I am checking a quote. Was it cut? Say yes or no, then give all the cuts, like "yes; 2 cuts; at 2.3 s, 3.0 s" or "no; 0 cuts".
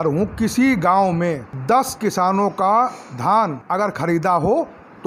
no; 0 cuts